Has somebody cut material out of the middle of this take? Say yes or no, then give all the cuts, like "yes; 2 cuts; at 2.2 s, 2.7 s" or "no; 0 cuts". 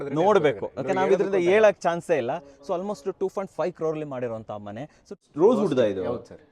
yes; 1 cut; at 5.2 s